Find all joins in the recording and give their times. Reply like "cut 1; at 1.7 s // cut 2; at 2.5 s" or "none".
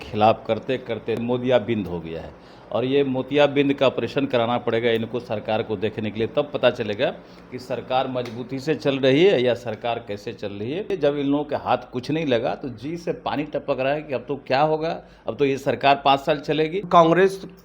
cut 1; at 1.2 s // cut 2; at 10.9 s // cut 3; at 16.8 s